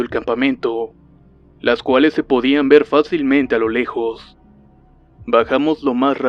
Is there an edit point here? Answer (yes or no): yes